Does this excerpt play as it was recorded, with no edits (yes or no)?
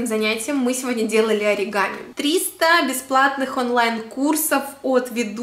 no